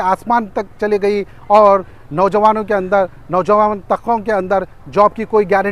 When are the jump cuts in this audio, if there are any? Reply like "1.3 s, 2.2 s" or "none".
none